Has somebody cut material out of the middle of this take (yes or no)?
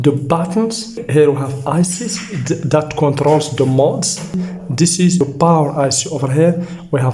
yes